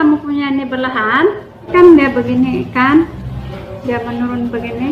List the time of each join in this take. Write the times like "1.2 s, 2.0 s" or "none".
1.7 s